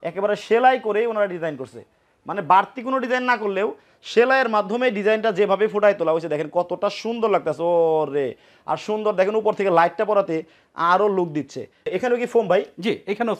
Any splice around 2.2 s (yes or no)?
no